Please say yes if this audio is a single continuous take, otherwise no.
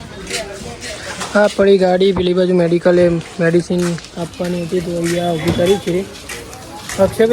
yes